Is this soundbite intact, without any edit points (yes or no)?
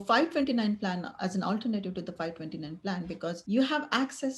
no